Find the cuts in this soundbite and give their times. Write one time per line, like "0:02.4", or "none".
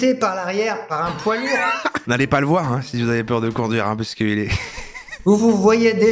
0:01.8
0:05.1

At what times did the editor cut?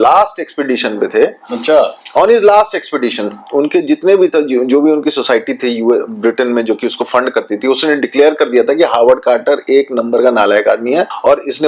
none

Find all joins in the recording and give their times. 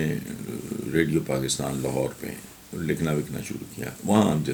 none

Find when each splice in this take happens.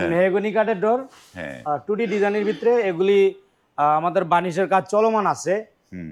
none

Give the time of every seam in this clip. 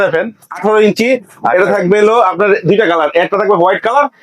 none

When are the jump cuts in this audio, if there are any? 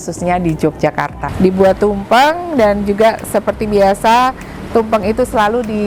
0:01.2

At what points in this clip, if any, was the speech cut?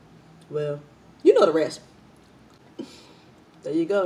0:02.5

